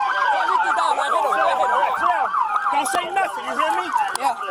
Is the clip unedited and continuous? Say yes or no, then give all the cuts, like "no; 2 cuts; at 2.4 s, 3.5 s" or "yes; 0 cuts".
yes; 0 cuts